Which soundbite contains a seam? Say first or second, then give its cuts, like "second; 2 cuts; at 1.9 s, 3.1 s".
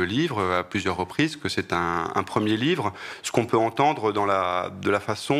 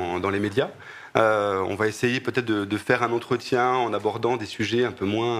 second; 1 cut; at 4.4 s